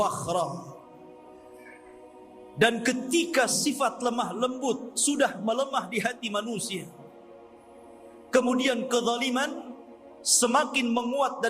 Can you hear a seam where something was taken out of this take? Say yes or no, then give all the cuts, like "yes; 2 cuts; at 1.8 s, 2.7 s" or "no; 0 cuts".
no; 0 cuts